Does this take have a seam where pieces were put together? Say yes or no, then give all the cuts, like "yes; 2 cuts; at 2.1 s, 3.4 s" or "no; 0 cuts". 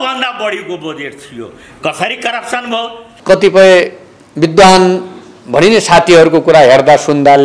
yes; 1 cut; at 3.1 s